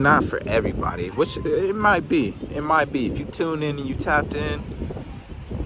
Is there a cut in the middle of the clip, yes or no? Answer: no